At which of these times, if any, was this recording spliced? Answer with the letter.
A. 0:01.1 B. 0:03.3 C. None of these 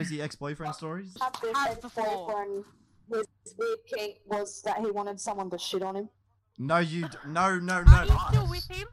A